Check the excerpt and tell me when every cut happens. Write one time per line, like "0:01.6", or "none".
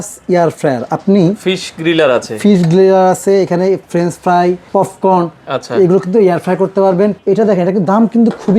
0:04.6
0:07.2